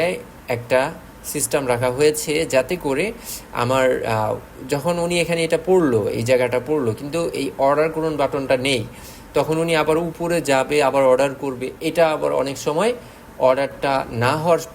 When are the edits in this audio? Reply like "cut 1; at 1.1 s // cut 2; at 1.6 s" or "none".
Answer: none